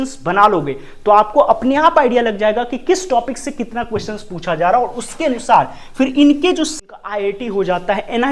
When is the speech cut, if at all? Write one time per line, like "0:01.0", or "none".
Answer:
0:06.7

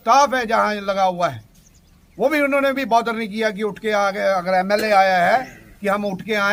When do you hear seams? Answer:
none

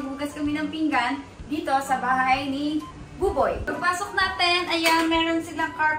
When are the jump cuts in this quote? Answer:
none

